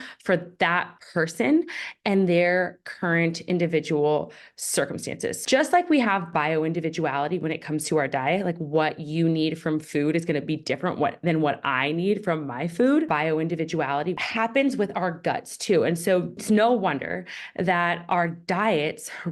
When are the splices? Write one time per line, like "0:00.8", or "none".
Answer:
0:05.4
0:13.1
0:16.4